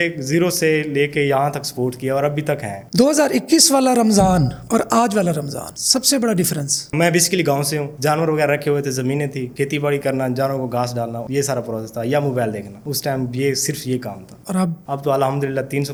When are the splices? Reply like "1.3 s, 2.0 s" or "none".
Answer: none